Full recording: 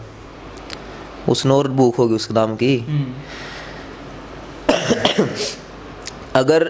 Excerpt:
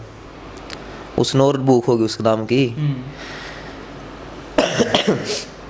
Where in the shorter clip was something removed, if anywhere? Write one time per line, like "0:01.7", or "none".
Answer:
0:01.1